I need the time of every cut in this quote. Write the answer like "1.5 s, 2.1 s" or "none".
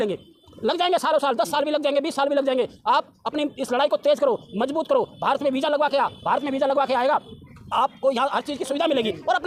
none